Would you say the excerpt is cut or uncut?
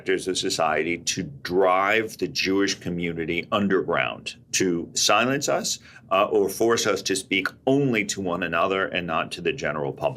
uncut